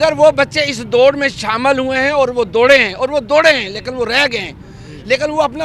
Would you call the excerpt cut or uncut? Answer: uncut